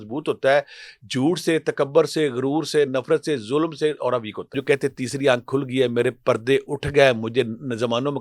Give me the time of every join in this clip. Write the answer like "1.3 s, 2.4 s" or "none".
4.6 s